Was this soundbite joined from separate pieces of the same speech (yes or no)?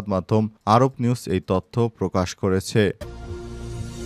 yes